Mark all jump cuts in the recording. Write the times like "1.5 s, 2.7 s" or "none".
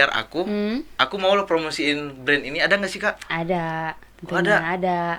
none